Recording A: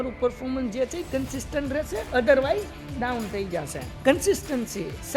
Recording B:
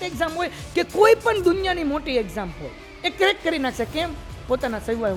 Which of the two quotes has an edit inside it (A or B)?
A